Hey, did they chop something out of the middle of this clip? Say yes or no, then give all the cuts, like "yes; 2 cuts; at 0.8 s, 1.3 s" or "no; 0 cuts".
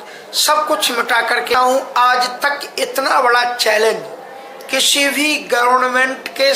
yes; 1 cut; at 1.5 s